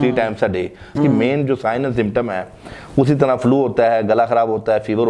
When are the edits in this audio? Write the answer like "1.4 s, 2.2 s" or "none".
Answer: 1.0 s